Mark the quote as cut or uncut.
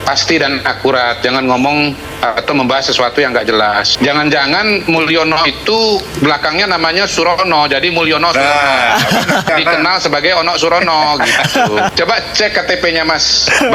uncut